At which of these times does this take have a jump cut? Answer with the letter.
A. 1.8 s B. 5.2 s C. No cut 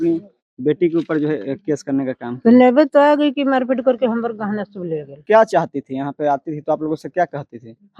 B